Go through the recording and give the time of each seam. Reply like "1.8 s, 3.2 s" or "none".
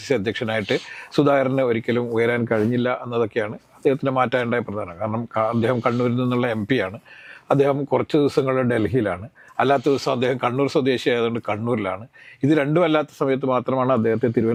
none

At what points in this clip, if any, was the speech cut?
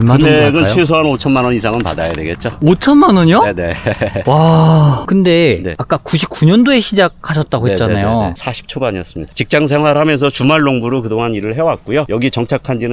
5.0 s

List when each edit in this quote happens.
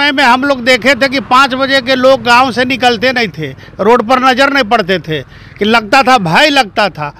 none

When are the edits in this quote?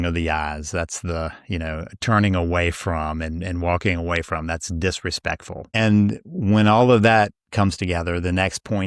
none

